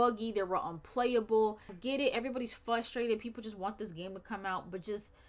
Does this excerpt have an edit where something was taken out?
yes; 1 cut; at 1.8 s

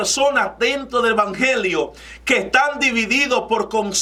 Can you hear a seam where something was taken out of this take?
no; 0 cuts

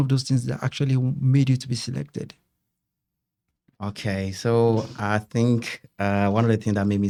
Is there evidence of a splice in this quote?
no; 0 cuts

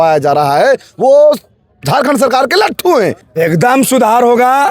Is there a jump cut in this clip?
yes; 1 cut; at 3.2 s

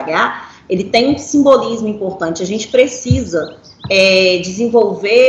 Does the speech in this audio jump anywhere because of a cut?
no; 0 cuts

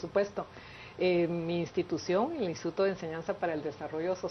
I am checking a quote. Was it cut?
no; 0 cuts

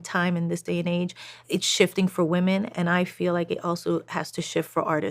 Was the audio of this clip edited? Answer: yes; 1 cut; at 1.5 s

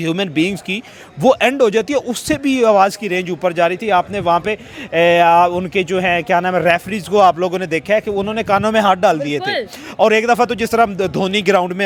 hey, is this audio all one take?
yes; 0 cuts

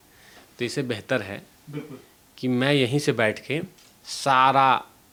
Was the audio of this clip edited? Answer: no; 0 cuts

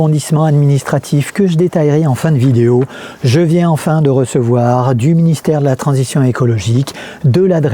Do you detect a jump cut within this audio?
no; 0 cuts

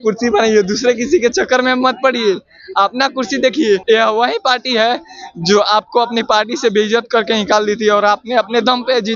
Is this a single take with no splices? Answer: no; 1 cut; at 3.8 s

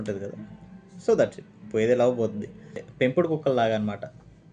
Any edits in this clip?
yes; 1 cut; at 2.8 s

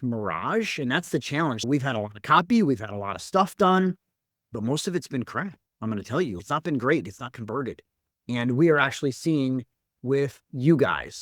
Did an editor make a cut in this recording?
yes; 1 cut; at 1.6 s

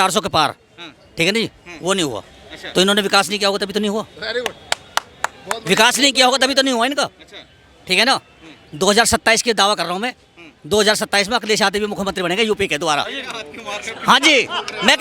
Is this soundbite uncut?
yes; 0 cuts

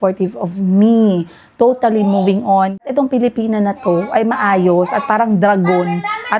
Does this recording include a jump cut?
yes; 1 cut; at 2.7 s

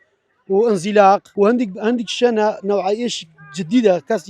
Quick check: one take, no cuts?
no; 1 cut; at 1.3 s

